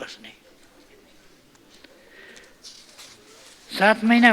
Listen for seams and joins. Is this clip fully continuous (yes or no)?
yes